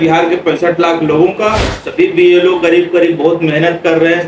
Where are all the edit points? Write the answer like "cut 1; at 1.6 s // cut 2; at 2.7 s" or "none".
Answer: cut 1; at 1.8 s